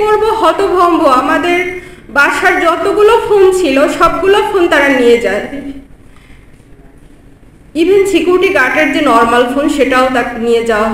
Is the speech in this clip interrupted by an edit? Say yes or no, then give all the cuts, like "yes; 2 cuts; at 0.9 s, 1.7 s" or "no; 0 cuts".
no; 0 cuts